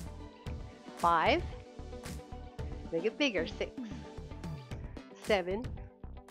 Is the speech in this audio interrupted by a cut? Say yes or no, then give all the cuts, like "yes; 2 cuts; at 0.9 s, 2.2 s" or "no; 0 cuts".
yes; 5 cuts; at 1.0 s, 1.4 s, 2.9 s, 3.7 s, 5.2 s